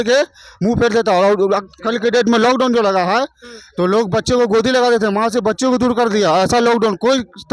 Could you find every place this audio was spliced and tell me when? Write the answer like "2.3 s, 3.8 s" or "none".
none